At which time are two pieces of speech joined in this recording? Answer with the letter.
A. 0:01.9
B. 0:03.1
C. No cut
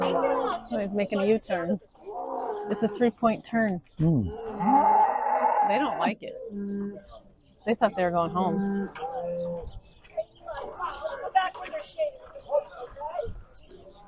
C